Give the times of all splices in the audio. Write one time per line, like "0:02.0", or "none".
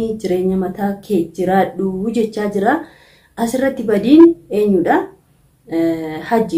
none

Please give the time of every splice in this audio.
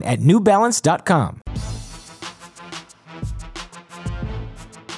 0:01.4
0:02.7

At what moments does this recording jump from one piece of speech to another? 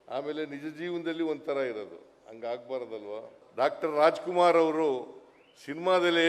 0:03.4

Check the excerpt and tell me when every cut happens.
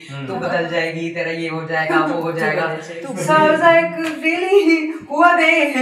none

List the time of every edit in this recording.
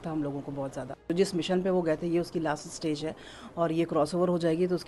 0:01.1

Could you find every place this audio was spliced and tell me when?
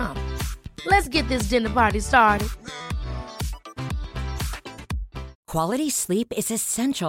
0:05.3

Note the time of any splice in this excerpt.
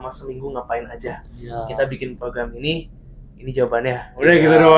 none

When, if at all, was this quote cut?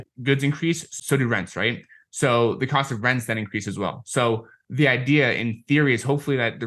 0:00.9

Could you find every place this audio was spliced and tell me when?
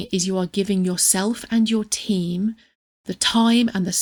none

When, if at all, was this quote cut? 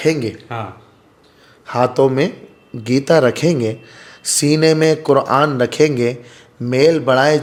none

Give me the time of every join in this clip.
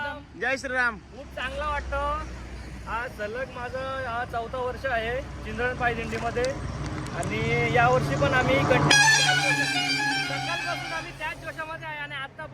none

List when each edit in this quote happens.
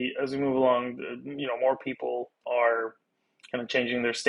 0:02.4

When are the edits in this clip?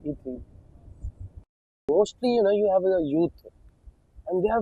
0:01.9

